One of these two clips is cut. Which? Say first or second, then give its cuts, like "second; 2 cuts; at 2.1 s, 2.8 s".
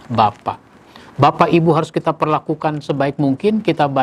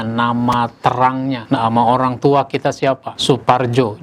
second; 2 cuts; at 1.4 s, 3.1 s